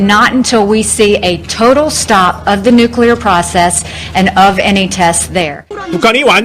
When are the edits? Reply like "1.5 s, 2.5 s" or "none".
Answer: 1.3 s